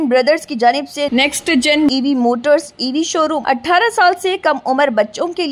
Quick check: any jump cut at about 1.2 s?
no; 1 cut; at 3.4 s

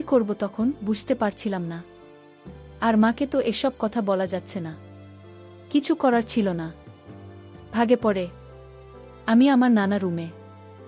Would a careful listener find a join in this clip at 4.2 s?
yes; 1 cut; at 4.2 s

